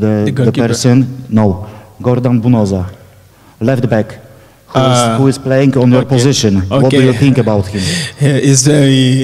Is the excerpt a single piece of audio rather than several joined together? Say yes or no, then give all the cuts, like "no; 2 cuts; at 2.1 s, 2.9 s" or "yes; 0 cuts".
yes; 0 cuts